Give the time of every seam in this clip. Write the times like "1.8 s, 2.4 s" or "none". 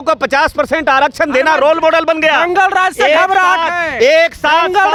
none